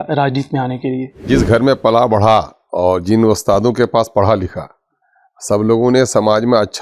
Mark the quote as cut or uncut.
cut